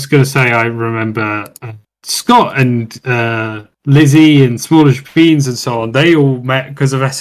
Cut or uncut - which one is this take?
uncut